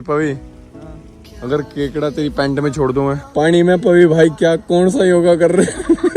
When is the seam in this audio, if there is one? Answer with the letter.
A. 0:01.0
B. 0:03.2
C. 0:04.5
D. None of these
B